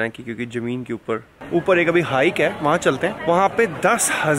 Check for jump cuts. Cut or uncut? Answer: cut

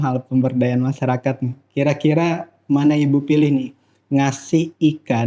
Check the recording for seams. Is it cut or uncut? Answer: uncut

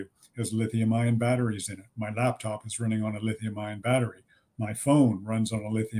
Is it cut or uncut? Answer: uncut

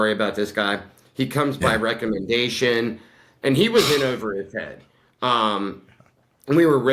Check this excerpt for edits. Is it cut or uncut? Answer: uncut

